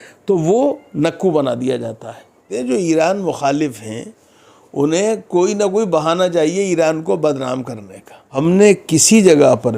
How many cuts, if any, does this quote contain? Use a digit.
2